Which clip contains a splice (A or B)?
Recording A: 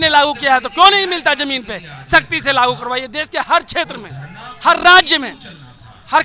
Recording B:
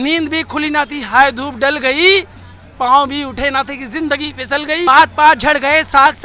B